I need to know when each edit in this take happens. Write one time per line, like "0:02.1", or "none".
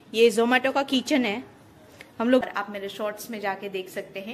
0:02.5